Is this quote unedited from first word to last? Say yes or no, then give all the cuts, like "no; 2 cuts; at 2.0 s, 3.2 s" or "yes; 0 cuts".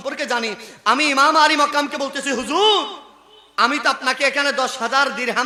yes; 0 cuts